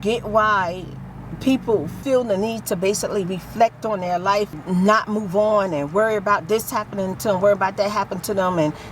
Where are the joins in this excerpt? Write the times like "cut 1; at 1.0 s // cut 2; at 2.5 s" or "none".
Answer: cut 1; at 1.9 s // cut 2; at 4.6 s

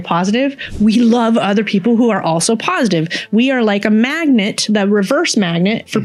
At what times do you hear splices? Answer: none

